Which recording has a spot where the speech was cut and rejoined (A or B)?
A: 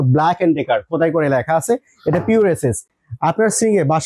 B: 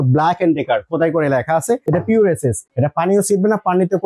B